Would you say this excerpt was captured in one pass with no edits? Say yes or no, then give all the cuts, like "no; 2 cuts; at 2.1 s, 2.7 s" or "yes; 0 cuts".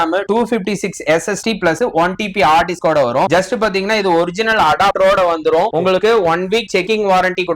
yes; 0 cuts